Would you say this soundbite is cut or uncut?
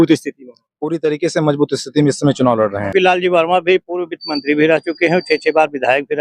cut